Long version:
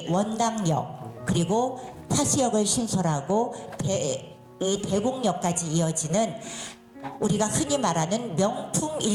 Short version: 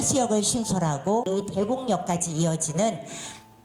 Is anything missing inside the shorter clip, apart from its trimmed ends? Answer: yes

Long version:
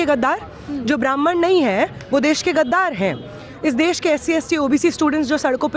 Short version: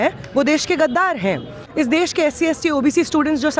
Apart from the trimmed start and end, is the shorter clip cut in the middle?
yes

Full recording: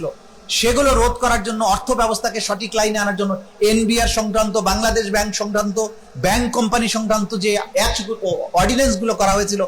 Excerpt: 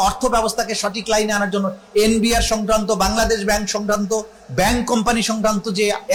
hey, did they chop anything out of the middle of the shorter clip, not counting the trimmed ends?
no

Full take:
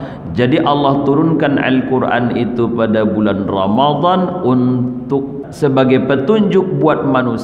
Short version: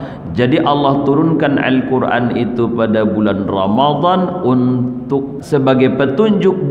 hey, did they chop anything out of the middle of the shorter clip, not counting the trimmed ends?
yes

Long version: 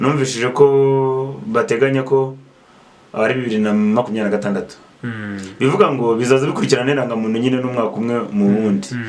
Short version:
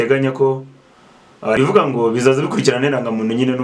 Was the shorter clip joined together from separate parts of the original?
yes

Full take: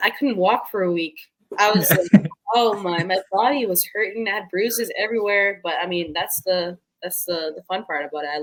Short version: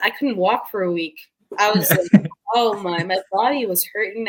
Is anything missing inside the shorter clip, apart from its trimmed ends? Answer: no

